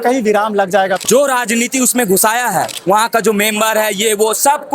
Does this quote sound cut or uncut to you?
cut